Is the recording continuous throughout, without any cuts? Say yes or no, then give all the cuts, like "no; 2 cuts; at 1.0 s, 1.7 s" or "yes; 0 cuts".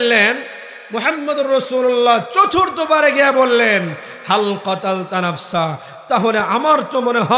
yes; 0 cuts